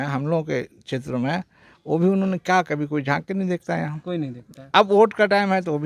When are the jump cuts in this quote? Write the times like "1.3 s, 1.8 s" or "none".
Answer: none